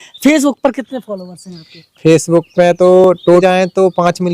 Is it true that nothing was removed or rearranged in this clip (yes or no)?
no